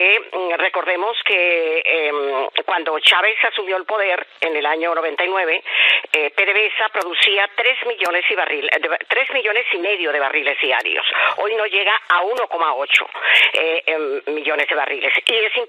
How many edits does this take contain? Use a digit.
0